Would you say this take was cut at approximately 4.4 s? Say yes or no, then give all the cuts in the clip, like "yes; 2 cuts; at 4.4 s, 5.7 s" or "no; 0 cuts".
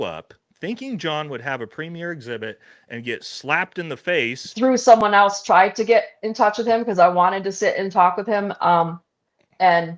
yes; 1 cut; at 4.4 s